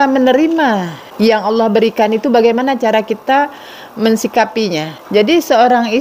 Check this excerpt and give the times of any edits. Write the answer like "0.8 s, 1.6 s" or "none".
1.0 s, 4.9 s